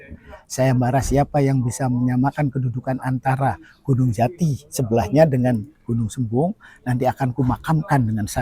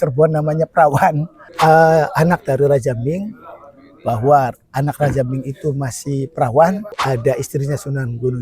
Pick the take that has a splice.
second; 2 cuts; at 1.5 s, 7.0 s

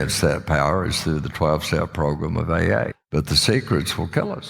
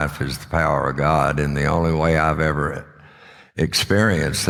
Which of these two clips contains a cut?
first; 1 cut; at 2.9 s

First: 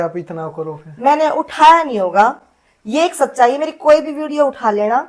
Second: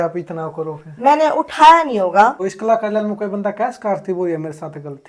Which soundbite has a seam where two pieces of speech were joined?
second; 1 cut; at 2.5 s

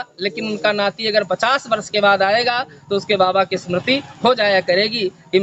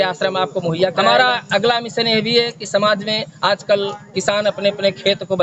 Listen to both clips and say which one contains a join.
second; 1 cut; at 1.1 s

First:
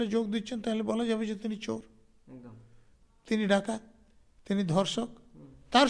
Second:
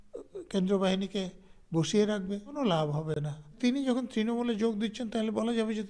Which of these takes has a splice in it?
second; 2 cuts; at 2.5 s, 3.5 s

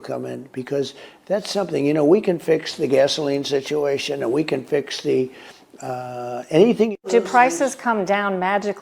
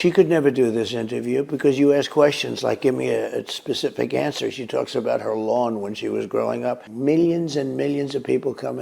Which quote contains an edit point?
second; 1 cut; at 6.9 s

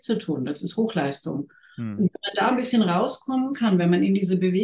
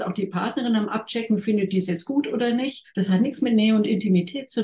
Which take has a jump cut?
second; 1 cut; at 2.8 s

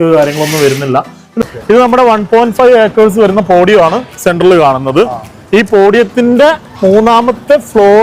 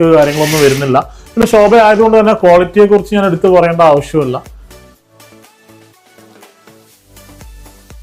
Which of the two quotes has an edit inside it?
first; 1 cut; at 1.4 s

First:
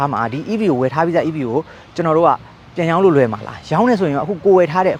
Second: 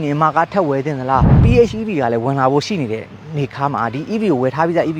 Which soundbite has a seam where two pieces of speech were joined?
second; 1 cut; at 1.4 s

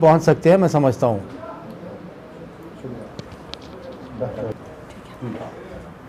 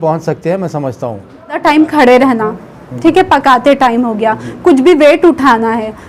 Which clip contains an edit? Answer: second; 1 cut; at 1.6 s

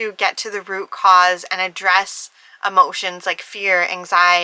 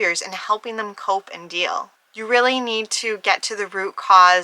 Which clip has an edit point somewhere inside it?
second; 1 cut; at 2.0 s

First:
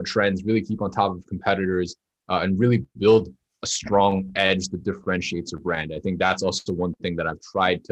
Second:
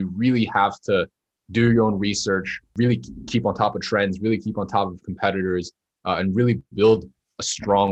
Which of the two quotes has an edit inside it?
second; 1 cut; at 2.7 s

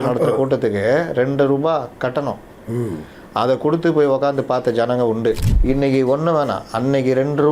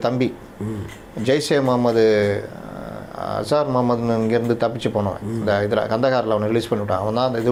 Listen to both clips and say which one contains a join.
first; 1 cut; at 5.5 s

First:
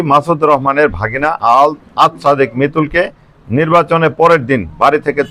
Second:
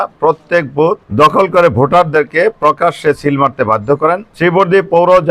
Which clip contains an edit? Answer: second; 2 cuts; at 1.0 s, 4.3 s

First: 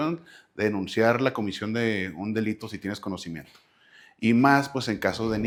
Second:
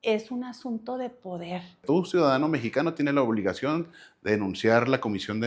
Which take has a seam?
second; 1 cut; at 1.8 s

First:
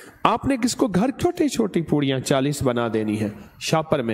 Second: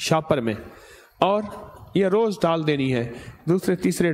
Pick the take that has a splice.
first; 1 cut; at 1.2 s

